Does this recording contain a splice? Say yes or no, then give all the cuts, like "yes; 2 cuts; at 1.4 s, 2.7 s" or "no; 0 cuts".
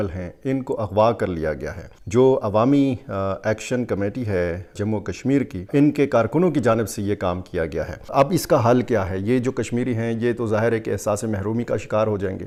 no; 0 cuts